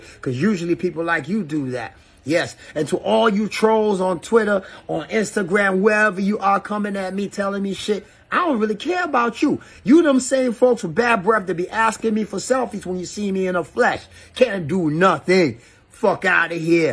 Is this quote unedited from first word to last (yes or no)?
yes